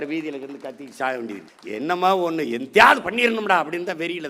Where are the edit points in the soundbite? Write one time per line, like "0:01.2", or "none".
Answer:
0:01.5